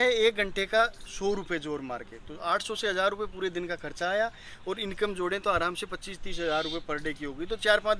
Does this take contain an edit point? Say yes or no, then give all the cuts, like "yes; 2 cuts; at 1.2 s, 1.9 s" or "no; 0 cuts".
no; 0 cuts